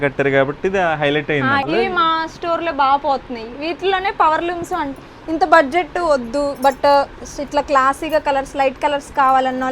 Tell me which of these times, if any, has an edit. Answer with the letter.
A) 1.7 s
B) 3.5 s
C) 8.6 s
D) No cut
A